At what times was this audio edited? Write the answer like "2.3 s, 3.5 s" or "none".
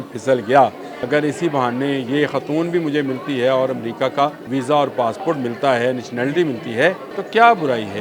0.9 s, 4.4 s, 7.1 s